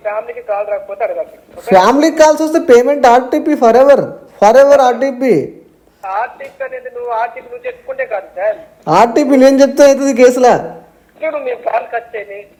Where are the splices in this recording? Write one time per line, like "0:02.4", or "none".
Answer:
none